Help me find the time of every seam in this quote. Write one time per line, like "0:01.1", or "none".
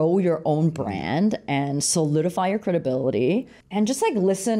0:03.6